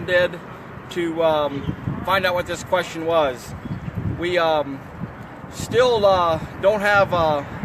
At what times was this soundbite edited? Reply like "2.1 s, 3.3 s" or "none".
none